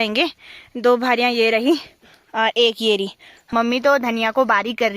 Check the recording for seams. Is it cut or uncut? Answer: cut